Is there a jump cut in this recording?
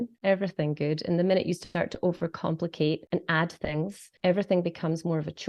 yes; 2 cuts; at 3.0 s, 4.0 s

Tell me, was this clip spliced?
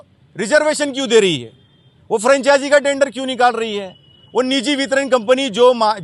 no; 0 cuts

